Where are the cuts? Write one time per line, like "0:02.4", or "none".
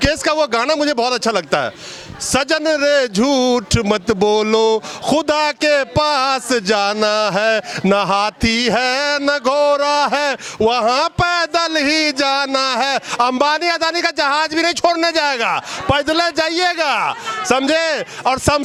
none

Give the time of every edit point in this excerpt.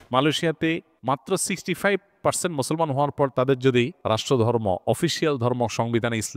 0:00.9
0:04.0

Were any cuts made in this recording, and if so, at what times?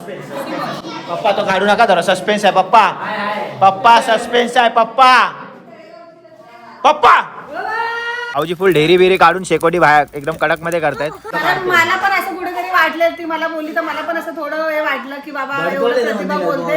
0:08.3
0:11.3

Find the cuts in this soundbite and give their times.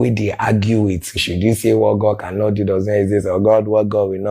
0:01.2

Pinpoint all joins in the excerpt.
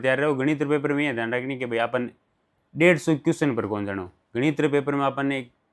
none

